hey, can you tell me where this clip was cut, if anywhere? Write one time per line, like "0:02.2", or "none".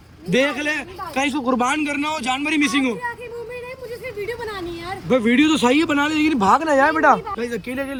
none